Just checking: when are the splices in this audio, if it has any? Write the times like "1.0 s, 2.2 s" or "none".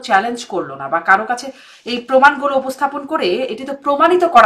none